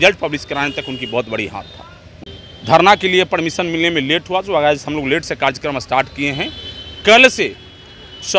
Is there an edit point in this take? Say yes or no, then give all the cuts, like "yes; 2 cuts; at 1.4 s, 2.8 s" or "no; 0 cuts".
yes; 1 cut; at 2.0 s